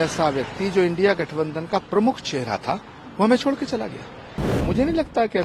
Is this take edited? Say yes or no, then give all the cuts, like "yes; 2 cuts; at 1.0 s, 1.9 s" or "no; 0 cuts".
yes; 1 cut; at 4.5 s